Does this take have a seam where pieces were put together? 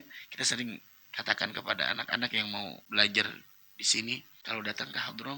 yes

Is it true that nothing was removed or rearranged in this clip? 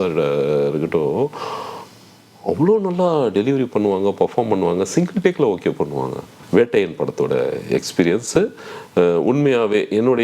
no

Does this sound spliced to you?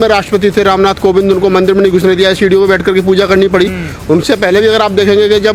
no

